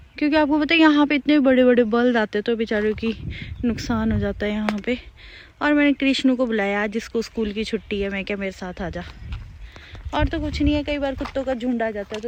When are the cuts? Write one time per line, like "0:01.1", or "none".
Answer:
none